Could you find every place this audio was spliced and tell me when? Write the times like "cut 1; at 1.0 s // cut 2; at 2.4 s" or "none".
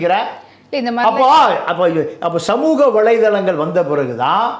none